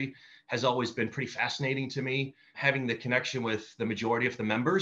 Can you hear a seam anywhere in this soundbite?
yes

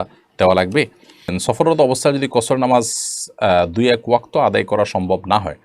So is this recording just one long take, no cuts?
no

